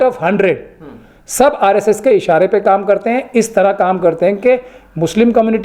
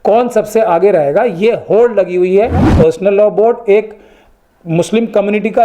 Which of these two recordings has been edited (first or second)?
second